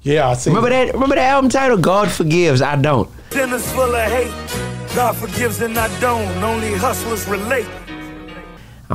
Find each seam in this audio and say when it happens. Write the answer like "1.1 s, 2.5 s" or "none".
none